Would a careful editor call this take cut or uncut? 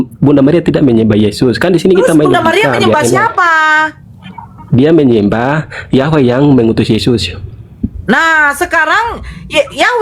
uncut